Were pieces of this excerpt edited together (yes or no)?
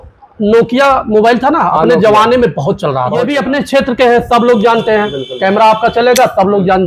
yes